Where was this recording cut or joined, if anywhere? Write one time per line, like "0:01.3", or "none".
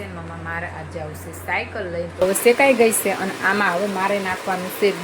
0:02.2